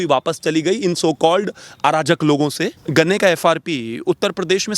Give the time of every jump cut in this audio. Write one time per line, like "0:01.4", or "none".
0:02.8